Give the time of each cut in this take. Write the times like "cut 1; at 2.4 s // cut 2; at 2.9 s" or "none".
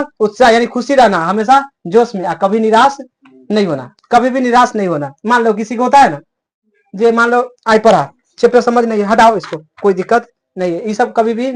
none

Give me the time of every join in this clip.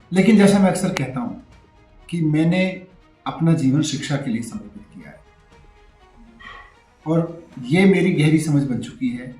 none

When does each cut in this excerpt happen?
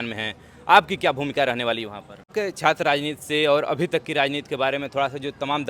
cut 1; at 2.3 s

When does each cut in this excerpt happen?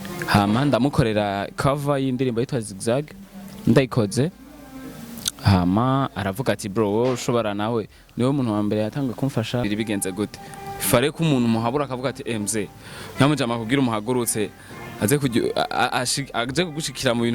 cut 1; at 9.7 s

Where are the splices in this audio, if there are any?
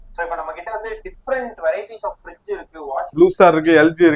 cut 1; at 3.1 s

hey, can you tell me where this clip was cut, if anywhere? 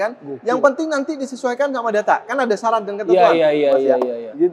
none

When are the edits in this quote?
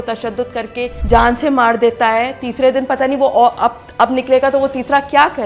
cut 1; at 1.0 s

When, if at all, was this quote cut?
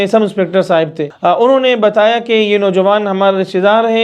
cut 1; at 1.1 s

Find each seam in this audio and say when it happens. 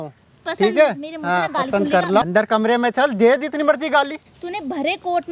cut 1; at 2.2 s // cut 2; at 4.4 s

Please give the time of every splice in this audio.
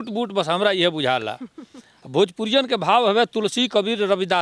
none

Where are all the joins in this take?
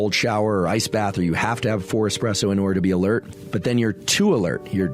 cut 1; at 3.4 s

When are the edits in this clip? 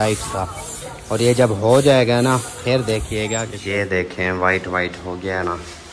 cut 1; at 3.5 s

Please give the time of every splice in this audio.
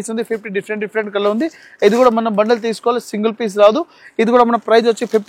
none

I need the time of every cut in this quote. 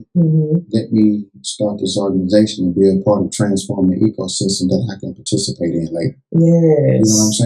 none

